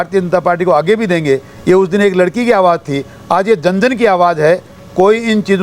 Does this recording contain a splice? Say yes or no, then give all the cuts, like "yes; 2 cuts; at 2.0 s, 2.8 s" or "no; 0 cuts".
no; 0 cuts